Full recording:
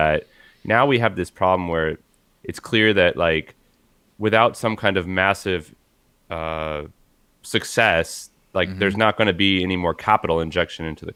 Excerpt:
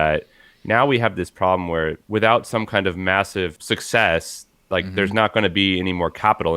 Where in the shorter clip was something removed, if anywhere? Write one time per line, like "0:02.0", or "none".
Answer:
0:02.0
0:03.6